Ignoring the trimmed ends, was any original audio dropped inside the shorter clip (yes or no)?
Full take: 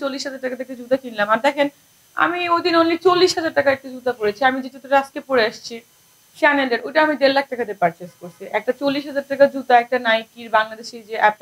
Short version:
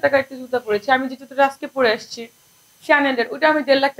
no